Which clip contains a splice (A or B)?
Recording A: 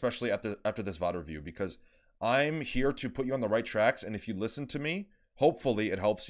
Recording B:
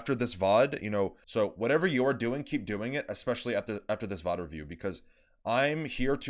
B